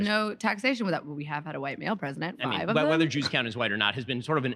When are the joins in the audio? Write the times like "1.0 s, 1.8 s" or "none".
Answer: 2.3 s